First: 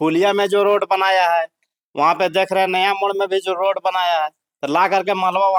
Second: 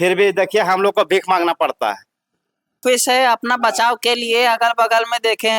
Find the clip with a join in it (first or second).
second